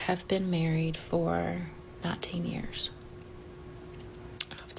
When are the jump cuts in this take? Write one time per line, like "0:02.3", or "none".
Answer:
0:03.4

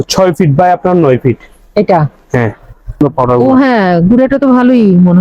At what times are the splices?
0:03.0

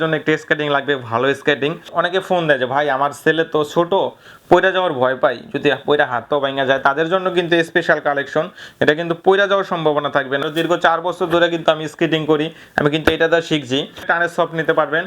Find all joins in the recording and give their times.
0:01.9
0:10.4
0:14.0

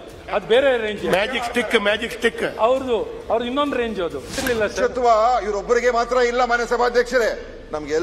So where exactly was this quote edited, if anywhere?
0:04.3

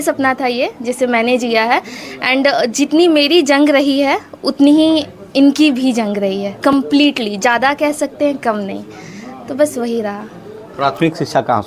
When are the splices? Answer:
none

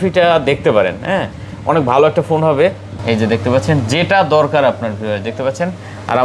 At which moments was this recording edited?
0:02.9

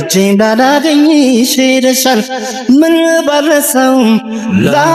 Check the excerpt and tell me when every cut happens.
none

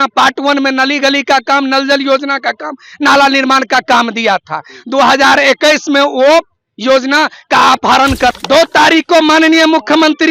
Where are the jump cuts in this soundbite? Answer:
0:08.4

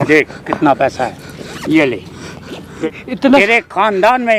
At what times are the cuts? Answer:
0:02.8

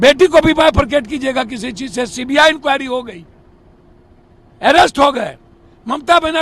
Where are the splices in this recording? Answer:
none

